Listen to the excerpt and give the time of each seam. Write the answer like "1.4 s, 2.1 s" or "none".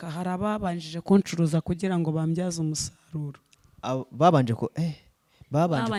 none